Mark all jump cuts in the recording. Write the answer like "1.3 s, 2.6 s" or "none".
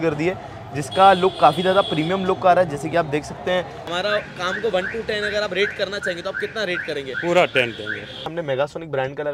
3.8 s, 8.4 s